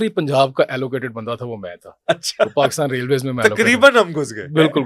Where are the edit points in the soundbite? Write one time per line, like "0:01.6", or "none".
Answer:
none